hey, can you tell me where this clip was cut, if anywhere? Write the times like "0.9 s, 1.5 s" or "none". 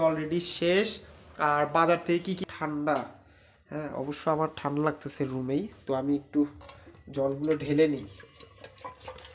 2.4 s